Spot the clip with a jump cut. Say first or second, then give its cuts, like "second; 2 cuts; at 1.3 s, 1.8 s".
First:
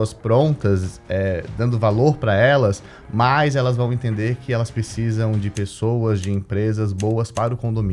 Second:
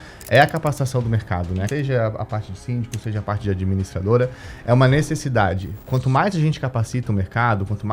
second; 2 cuts; at 1.7 s, 5.8 s